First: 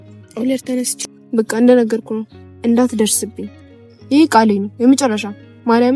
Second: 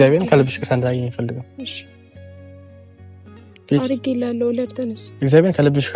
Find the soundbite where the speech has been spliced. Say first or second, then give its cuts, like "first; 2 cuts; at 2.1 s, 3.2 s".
first; 1 cut; at 0.9 s